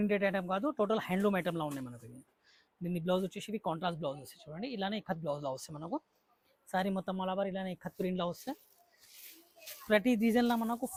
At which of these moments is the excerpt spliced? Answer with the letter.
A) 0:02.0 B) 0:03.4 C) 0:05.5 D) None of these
D